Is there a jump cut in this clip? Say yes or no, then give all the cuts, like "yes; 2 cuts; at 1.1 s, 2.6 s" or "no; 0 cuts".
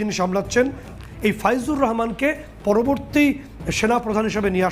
yes; 1 cut; at 1.0 s